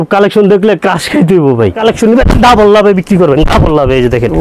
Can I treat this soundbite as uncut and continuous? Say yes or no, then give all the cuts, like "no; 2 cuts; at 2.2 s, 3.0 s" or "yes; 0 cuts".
no; 1 cut; at 1.8 s